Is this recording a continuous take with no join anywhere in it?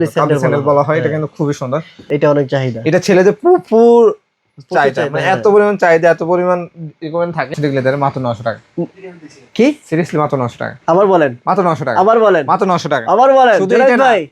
no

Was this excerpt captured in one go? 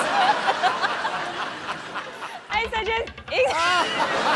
yes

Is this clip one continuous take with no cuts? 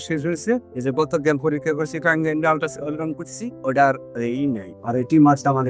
yes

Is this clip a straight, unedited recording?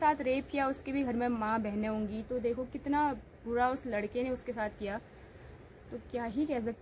yes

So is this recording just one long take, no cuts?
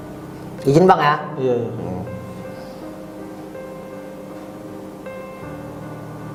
yes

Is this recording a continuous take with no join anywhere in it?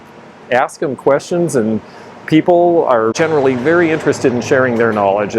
no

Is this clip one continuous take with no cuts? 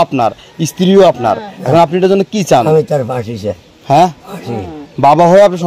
yes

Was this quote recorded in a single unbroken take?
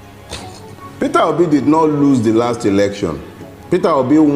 yes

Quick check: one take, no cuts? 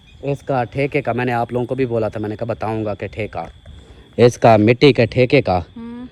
yes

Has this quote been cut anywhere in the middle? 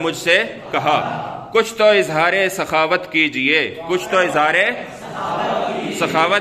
no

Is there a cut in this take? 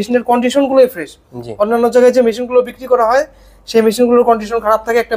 no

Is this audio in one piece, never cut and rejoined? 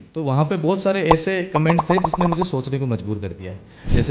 yes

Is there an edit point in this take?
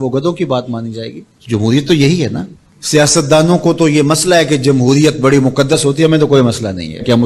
yes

